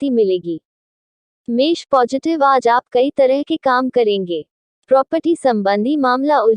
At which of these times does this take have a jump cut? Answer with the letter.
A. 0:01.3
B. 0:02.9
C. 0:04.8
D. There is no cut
A